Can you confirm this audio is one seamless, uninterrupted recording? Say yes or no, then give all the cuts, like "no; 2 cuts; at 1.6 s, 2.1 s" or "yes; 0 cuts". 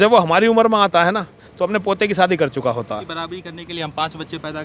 no; 1 cut; at 3.1 s